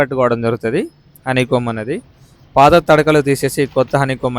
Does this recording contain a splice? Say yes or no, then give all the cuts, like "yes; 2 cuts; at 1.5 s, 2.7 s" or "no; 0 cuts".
no; 0 cuts